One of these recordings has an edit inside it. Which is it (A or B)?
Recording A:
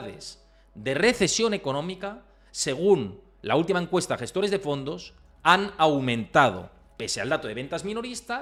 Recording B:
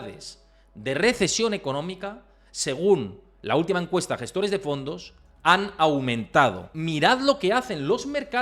B